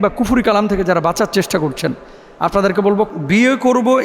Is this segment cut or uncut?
cut